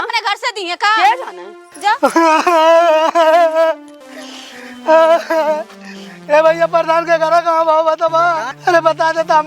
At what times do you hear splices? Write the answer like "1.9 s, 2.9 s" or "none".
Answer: 8.5 s

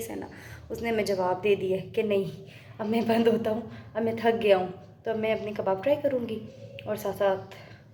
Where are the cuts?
none

